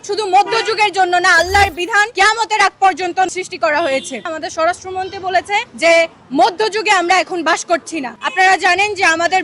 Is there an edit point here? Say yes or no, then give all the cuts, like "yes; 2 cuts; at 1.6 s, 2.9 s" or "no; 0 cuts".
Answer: yes; 5 cuts; at 2.1 s, 3.3 s, 4.3 s, 5.7 s, 8.2 s